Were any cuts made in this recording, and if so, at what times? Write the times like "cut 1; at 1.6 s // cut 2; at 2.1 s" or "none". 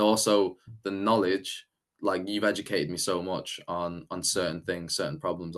none